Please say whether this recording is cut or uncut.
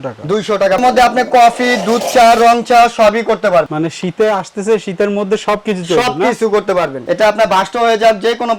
cut